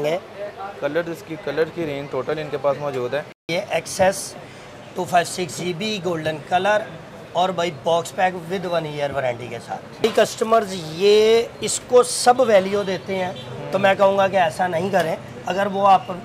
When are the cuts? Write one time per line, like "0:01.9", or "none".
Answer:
0:03.4
0:10.0